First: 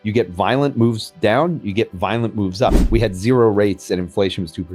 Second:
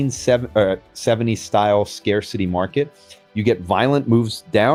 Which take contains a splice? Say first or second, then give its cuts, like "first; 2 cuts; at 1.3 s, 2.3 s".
first; 1 cut; at 2.8 s